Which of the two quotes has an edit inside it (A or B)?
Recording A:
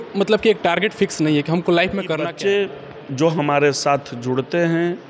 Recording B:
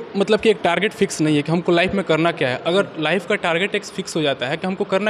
A